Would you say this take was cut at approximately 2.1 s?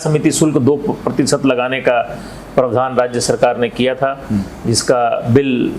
no; 0 cuts

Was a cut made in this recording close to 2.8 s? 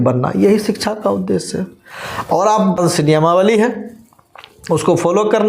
yes; 1 cut; at 2.8 s

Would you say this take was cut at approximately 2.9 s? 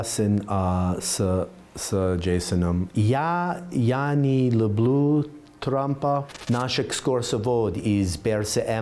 yes; 2 cuts; at 2.9 s, 6.3 s

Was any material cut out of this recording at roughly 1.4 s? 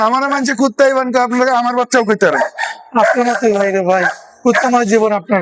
no; 0 cuts

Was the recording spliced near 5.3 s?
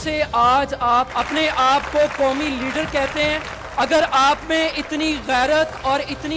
no; 2 cuts; at 1.1 s, 3.6 s

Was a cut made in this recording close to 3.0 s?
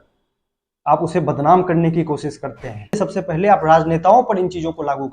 yes; 1 cut; at 3.0 s

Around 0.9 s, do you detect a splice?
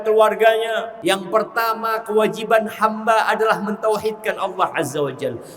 yes; 1 cut; at 0.9 s

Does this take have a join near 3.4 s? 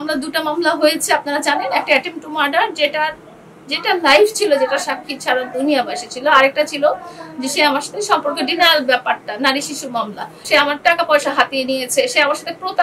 no; 1 cut; at 10.5 s

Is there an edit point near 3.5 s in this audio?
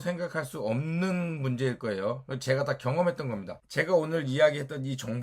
yes; 1 cut; at 3.5 s

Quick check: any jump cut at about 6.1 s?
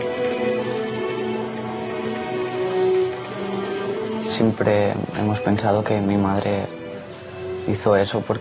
no; 0 cuts

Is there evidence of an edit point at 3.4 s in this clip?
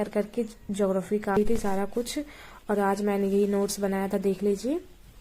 no; 1 cut; at 1.4 s

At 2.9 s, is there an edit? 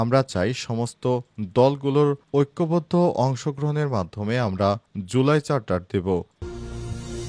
no; 1 cut; at 6.4 s

